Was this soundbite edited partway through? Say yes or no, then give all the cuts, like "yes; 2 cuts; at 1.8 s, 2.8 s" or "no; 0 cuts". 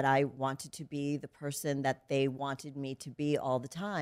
no; 0 cuts